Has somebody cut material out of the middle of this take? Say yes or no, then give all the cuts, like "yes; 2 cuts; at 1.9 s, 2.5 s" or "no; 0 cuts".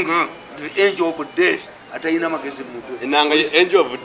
no; 0 cuts